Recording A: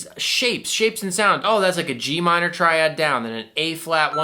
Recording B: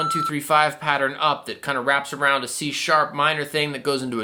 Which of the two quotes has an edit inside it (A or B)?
A